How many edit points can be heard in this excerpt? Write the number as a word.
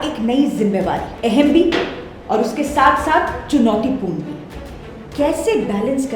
one